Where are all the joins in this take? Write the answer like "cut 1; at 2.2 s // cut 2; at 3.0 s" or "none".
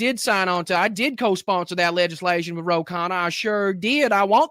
none